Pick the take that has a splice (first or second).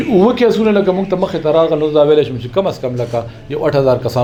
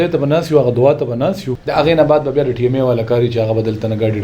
second